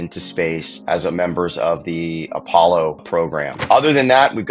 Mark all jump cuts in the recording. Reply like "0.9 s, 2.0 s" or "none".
3.5 s